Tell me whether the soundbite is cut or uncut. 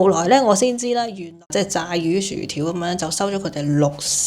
cut